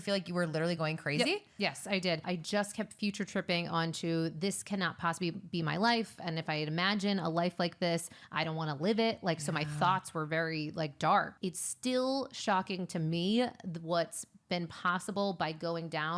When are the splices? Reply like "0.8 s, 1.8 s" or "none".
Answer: 2.2 s, 11.3 s